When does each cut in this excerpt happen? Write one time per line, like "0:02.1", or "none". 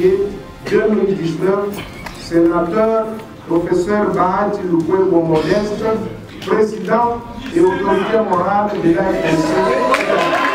none